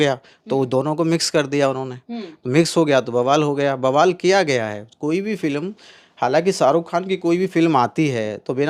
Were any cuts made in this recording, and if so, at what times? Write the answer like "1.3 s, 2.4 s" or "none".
none

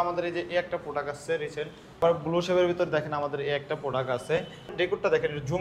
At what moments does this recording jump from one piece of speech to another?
2.0 s, 4.7 s

